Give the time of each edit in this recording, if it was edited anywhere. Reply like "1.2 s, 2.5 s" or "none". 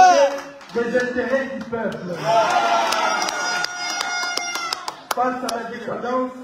none